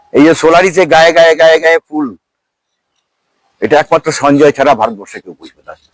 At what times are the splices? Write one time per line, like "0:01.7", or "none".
none